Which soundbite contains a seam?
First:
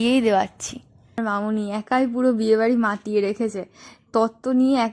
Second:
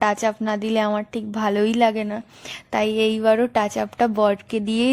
first; 1 cut; at 1.2 s

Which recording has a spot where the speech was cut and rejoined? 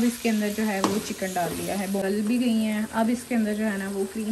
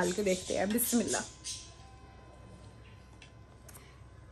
first; 1 cut; at 2.0 s

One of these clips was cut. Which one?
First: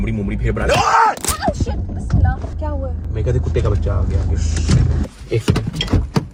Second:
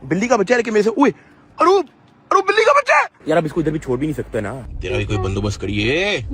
second; 2 cuts; at 3.2 s, 4.5 s

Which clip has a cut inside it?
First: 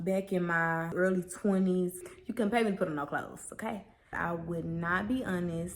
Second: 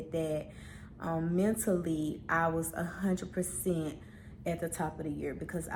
first; 3 cuts; at 0.9 s, 2.2 s, 4.2 s

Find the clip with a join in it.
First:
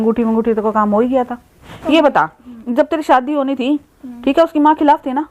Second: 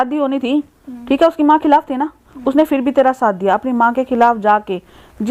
first; 1 cut; at 1.7 s

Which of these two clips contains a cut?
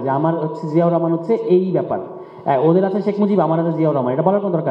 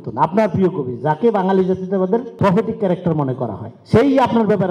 second; 1 cut; at 2.3 s

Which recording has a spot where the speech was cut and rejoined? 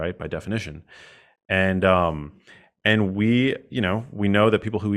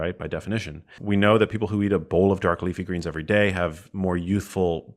second; 1 cut; at 1.0 s

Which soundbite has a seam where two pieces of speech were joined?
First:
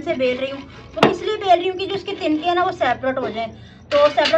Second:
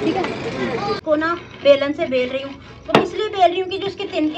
second; 1 cut; at 1.0 s

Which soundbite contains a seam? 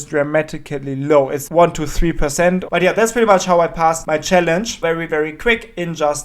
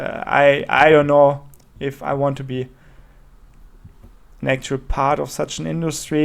first; 4 cuts; at 1.4 s, 2.7 s, 4.0 s, 4.8 s

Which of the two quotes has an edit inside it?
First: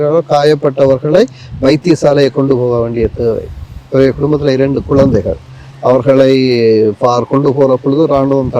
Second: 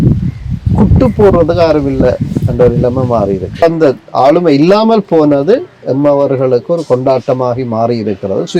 second; 1 cut; at 3.6 s

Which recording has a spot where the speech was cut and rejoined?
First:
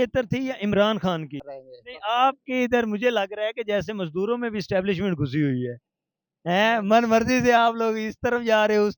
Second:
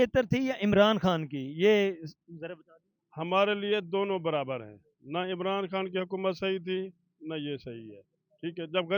first; 1 cut; at 1.4 s

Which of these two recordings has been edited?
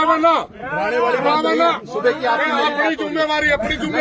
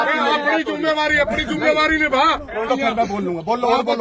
second; 1 cut; at 2.7 s

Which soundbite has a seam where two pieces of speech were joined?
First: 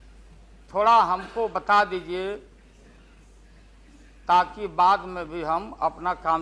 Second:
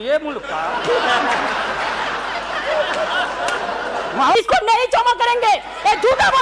second; 1 cut; at 4.4 s

